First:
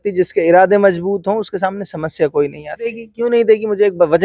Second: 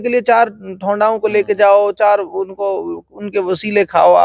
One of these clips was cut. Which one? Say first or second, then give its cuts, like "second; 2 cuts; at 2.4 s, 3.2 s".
first; 1 cut; at 3.0 s